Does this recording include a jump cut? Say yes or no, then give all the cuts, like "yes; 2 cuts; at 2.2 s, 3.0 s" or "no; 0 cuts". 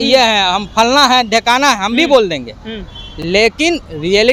no; 0 cuts